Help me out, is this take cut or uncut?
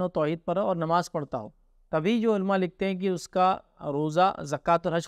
uncut